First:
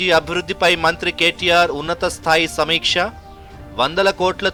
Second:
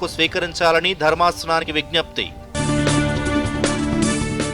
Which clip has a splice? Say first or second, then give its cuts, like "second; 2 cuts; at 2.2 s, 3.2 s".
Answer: second; 1 cut; at 1.7 s